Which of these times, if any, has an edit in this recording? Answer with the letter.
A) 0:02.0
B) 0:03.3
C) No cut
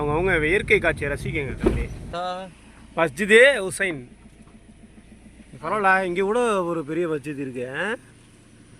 A